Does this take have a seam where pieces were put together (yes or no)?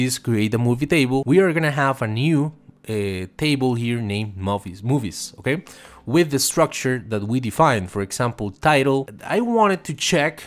yes